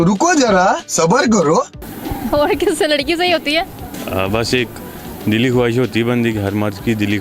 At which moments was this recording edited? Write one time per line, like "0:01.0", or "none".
none